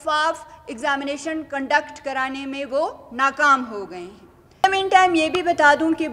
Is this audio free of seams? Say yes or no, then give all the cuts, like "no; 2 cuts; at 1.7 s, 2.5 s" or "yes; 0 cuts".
no; 1 cut; at 4.6 s